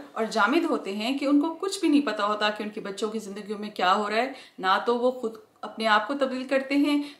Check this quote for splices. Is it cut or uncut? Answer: cut